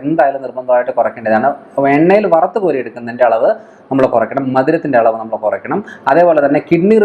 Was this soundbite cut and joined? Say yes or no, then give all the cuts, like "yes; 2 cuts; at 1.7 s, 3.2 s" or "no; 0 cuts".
no; 0 cuts